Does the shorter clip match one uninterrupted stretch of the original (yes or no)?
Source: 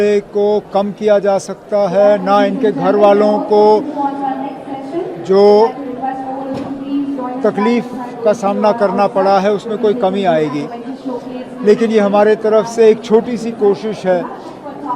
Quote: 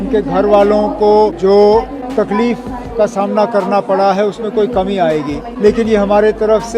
no